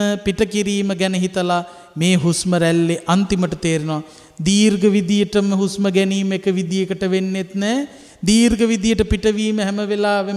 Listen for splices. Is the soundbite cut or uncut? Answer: uncut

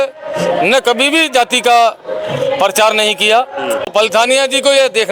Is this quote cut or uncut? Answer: cut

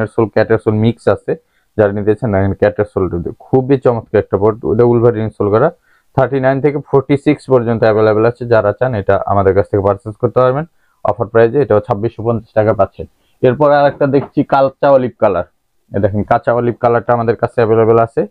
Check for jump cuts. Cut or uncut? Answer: uncut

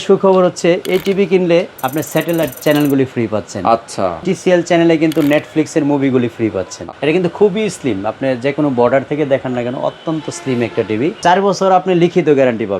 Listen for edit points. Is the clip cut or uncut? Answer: cut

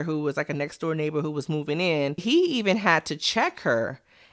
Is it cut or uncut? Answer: cut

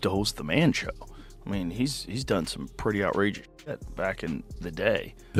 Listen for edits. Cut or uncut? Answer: uncut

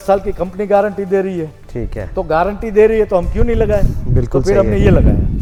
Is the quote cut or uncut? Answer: uncut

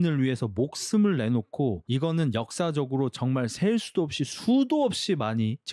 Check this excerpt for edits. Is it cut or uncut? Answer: uncut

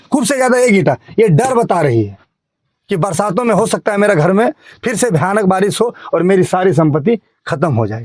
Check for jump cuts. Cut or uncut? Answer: uncut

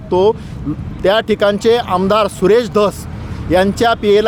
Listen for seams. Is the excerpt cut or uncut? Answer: uncut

